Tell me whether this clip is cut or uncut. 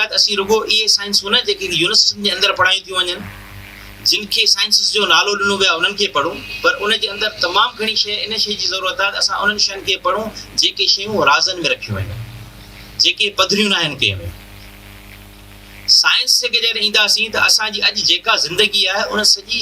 uncut